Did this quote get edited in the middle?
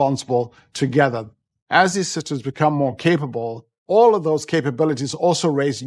no; 0 cuts

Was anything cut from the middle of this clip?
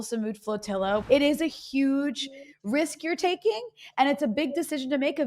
yes; 1 cut; at 1.0 s

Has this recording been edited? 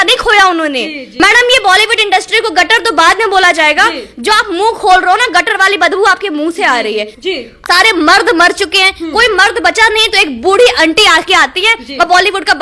yes; 2 cuts; at 1.1 s, 7.5 s

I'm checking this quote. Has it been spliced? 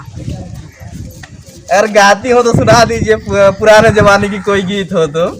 no; 0 cuts

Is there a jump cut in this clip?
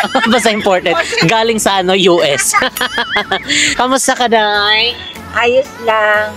yes; 1 cut; at 3.6 s

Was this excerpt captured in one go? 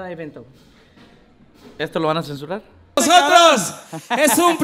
no; 1 cut; at 3.0 s

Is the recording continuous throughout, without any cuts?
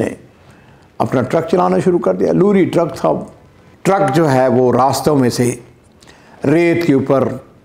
yes; 0 cuts

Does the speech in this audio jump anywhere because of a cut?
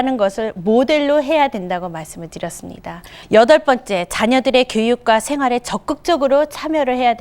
yes; 1 cut; at 3.1 s

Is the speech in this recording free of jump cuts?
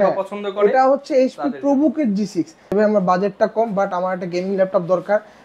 no; 1 cut; at 2.6 s

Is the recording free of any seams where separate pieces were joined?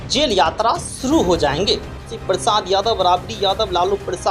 no; 1 cut; at 2.1 s

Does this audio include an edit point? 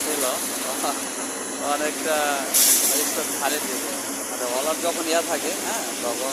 no; 0 cuts

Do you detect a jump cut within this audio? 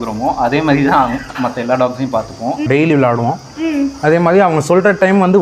yes; 1 cut; at 2.6 s

